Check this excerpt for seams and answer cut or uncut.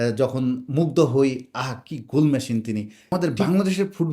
cut